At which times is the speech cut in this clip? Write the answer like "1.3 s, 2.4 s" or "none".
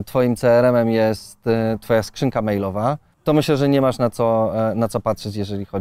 3.1 s